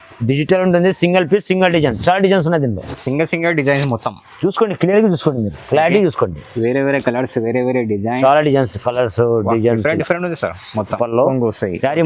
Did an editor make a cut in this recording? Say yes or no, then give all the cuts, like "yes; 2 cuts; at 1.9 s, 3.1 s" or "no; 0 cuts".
yes; 1 cut; at 11.0 s